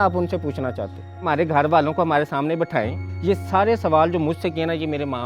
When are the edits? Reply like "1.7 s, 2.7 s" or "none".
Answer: 1.2 s, 3.1 s